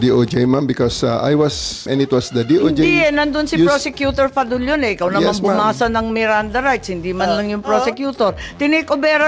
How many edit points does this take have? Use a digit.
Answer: 1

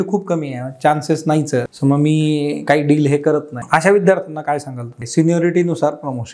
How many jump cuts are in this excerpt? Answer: 3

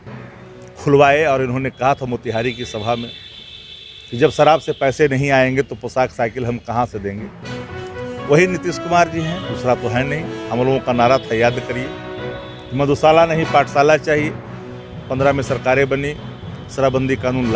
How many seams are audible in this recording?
1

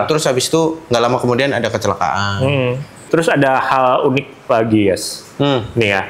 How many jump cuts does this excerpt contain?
1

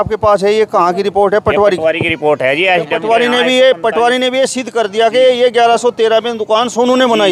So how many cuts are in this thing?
0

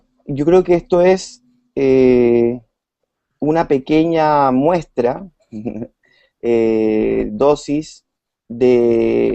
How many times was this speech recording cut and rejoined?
1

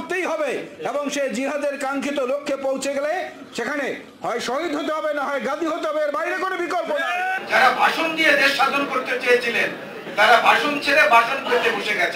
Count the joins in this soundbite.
1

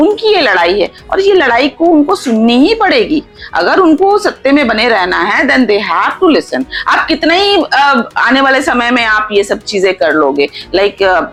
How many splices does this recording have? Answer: 0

